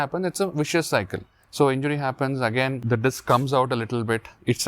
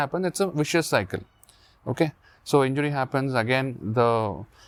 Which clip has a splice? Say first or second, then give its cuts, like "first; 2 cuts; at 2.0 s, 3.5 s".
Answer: first; 2 cuts; at 1.4 s, 2.8 s